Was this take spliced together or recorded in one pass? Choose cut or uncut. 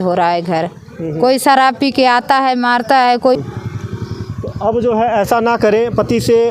uncut